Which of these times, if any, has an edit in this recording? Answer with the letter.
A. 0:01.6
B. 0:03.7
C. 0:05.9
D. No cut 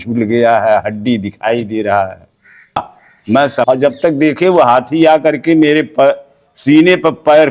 B